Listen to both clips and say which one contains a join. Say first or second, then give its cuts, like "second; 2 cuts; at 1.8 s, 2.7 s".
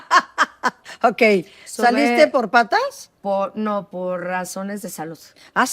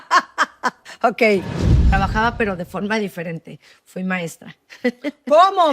second; 1 cut; at 1.8 s